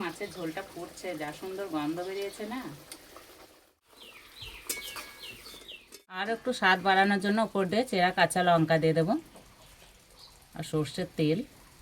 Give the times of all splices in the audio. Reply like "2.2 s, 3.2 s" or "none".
3.7 s, 6.3 s